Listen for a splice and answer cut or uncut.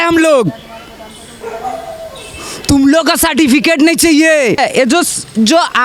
cut